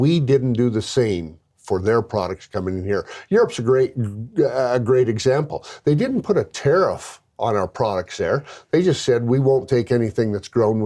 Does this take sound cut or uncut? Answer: uncut